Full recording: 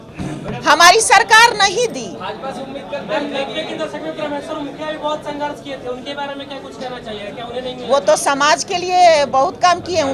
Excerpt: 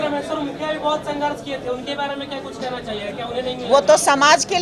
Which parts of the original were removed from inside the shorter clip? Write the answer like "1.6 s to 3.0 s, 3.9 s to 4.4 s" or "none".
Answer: none